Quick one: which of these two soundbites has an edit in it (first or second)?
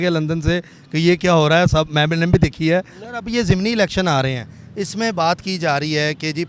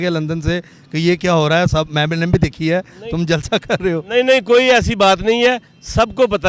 first